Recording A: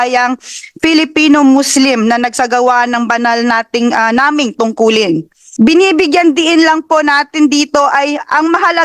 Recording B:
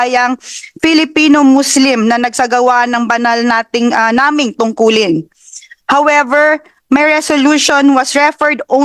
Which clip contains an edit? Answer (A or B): A